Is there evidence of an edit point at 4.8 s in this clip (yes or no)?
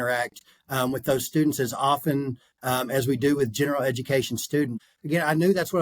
yes